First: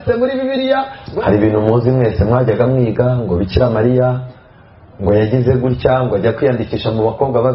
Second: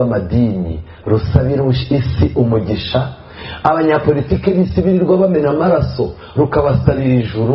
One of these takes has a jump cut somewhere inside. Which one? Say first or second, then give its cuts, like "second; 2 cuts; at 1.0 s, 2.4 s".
first; 1 cut; at 1.0 s